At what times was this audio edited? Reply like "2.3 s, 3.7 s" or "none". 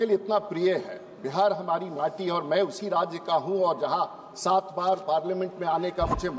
none